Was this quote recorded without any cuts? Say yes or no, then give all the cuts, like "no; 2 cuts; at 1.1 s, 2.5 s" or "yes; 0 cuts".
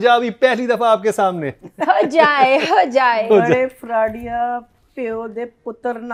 yes; 0 cuts